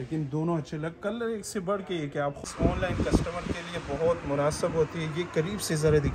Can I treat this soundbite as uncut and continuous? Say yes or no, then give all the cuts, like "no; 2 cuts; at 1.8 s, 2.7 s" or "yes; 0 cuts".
no; 1 cut; at 2.4 s